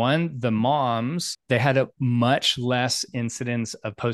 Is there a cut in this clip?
yes; 1 cut; at 1.4 s

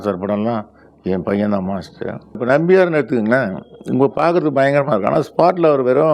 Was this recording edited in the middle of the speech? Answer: yes; 1 cut; at 2.4 s

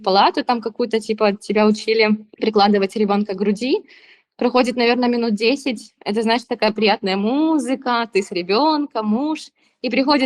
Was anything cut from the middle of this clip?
no; 0 cuts

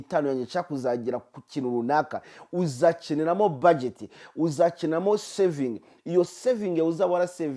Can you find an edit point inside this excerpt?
no; 0 cuts

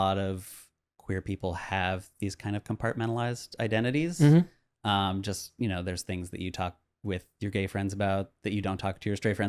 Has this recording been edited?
yes; 1 cut; at 0.9 s

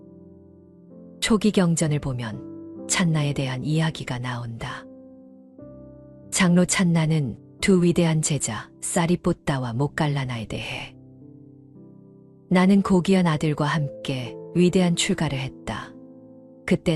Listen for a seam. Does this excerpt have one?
yes; 1 cut; at 0.9 s

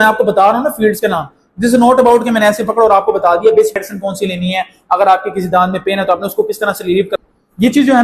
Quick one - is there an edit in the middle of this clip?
yes; 2 cuts; at 3.8 s, 7.1 s

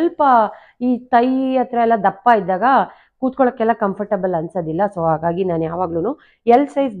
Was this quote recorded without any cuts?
yes; 0 cuts

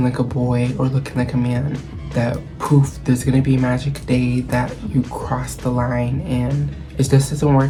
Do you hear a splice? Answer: no; 0 cuts

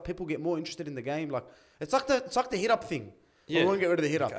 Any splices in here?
no; 0 cuts

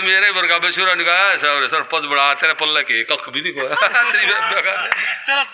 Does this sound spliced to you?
no; 0 cuts

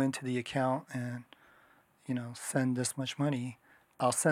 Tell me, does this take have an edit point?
no; 0 cuts

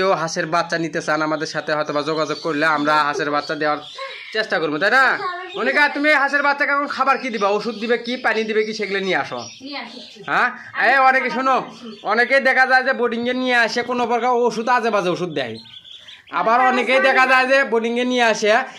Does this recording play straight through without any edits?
yes; 0 cuts

